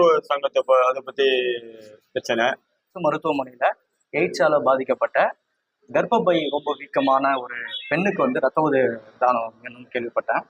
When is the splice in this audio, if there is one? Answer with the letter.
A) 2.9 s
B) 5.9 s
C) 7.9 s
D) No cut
A